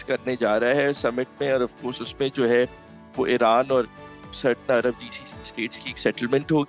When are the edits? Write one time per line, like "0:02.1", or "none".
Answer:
none